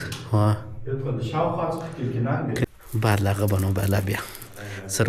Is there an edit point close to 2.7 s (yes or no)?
yes